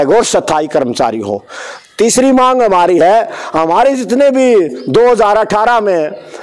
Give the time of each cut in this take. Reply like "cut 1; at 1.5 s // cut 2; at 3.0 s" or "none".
none